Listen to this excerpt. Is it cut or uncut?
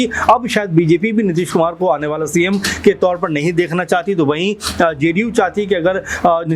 uncut